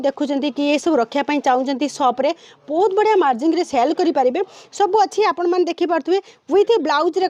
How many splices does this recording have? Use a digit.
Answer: 0